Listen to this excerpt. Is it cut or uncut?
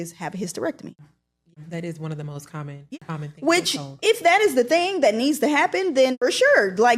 cut